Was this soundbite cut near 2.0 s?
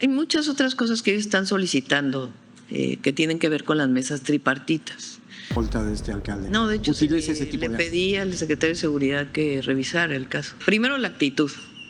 no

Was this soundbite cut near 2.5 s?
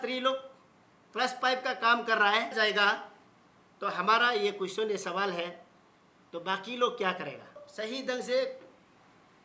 yes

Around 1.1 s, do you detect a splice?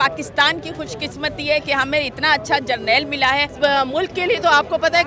no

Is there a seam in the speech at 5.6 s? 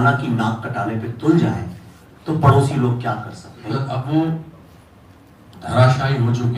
no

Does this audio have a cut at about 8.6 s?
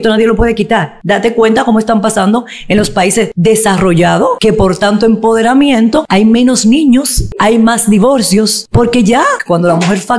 yes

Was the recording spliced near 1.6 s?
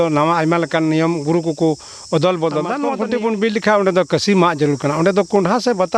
no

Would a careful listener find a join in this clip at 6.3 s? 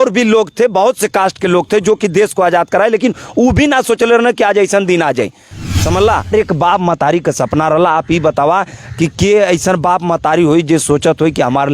yes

